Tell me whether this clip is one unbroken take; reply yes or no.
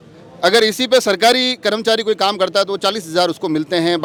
yes